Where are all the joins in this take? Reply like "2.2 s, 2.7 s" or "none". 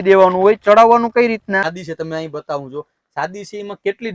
1.8 s